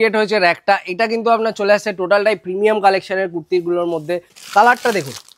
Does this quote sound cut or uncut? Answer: cut